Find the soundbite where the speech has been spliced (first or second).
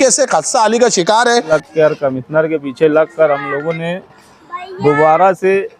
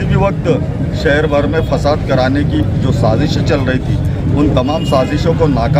first